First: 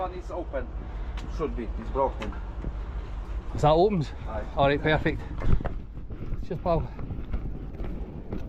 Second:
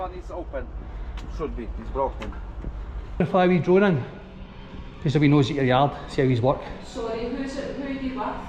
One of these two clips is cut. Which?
second; 1 cut; at 3.2 s

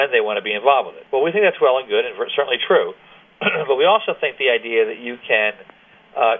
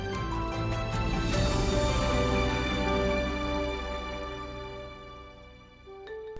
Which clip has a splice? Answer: first; 1 cut; at 1.0 s

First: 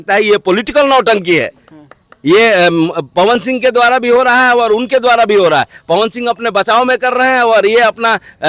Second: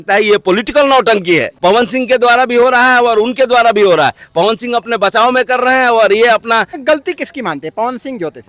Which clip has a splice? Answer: second; 2 cuts; at 1.5 s, 6.8 s

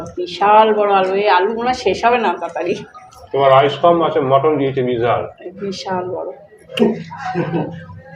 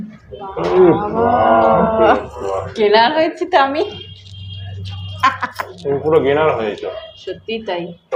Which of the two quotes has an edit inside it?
first; 1 cut; at 6.6 s

